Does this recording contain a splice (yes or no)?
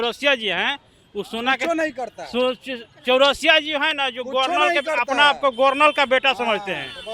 no